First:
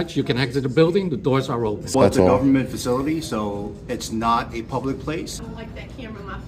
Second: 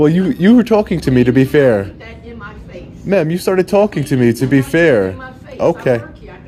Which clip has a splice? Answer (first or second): first